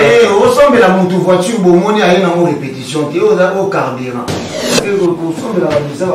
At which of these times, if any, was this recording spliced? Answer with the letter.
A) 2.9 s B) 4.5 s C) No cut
B